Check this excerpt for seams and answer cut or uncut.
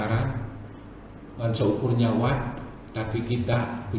uncut